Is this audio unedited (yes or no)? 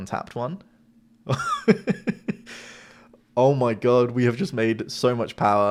yes